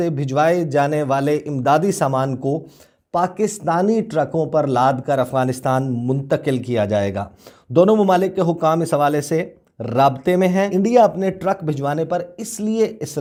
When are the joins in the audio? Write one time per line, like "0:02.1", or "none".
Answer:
none